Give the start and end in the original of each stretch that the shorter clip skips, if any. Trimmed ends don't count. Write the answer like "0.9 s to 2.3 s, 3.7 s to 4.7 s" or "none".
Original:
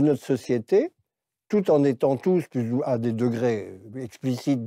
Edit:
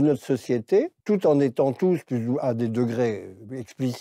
1.0 s to 1.4 s